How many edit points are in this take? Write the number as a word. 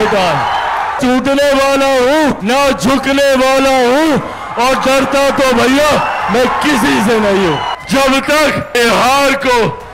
four